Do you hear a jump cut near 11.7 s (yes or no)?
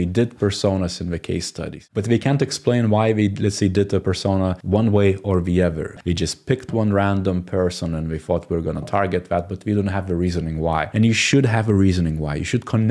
no